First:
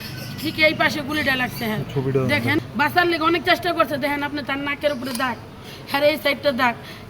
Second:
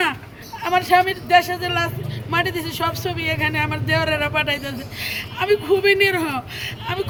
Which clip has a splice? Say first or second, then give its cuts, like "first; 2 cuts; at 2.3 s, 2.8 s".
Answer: first; 1 cut; at 2.6 s